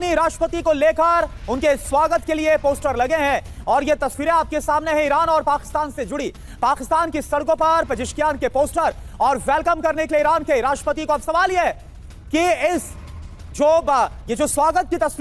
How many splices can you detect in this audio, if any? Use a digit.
0